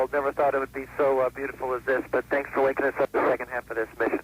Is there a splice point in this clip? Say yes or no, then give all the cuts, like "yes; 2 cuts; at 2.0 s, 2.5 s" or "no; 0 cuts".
yes; 1 cut; at 3.1 s